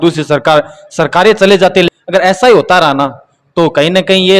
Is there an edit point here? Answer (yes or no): yes